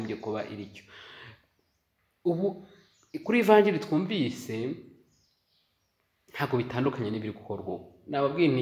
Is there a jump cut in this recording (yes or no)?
no